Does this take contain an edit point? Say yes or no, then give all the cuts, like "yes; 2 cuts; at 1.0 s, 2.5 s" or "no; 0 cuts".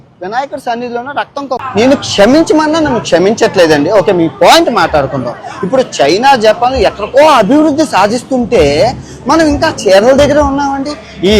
yes; 1 cut; at 1.7 s